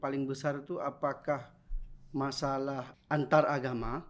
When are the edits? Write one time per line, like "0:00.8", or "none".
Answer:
0:02.9